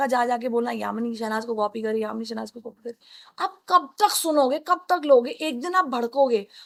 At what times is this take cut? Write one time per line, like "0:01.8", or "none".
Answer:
none